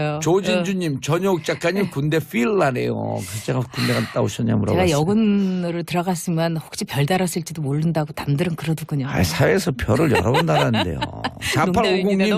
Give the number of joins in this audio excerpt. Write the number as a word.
zero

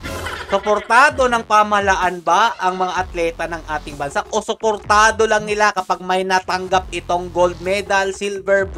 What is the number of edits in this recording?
zero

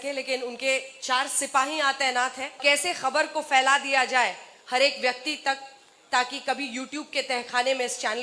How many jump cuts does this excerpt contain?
one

